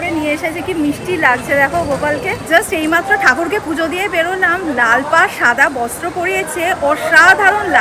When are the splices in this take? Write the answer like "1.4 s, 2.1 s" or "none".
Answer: 2.4 s